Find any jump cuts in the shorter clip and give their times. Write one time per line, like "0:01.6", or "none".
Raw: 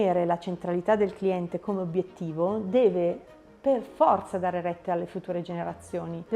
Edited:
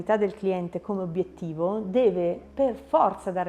0:02.4